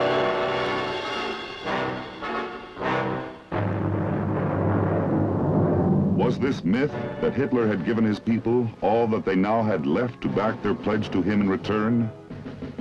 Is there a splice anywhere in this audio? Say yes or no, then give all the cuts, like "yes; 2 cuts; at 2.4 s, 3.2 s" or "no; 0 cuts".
no; 0 cuts